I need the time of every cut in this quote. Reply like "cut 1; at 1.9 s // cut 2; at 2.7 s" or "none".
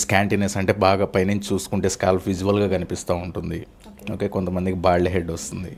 none